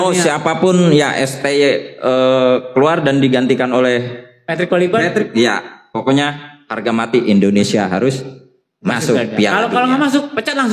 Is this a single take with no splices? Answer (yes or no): yes